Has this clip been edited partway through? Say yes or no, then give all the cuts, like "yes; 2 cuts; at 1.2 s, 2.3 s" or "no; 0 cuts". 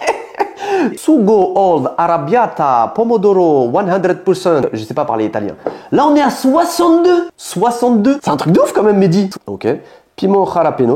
yes; 3 cuts; at 1.0 s, 5.7 s, 9.3 s